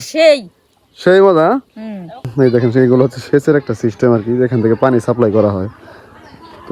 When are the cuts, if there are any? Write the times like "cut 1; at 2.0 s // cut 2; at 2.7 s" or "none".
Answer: cut 1; at 2.3 s

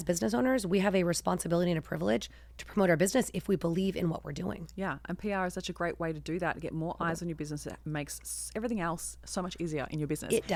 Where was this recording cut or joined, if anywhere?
none

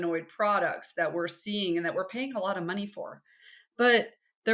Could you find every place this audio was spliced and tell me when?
none

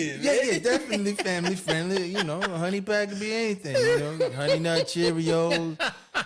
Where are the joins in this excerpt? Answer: none

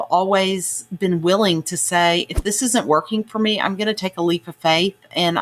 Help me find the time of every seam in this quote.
none

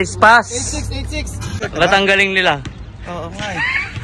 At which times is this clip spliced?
cut 1; at 1.6 s

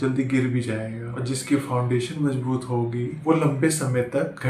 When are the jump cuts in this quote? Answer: none

